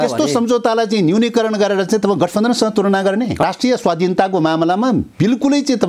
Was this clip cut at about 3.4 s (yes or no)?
yes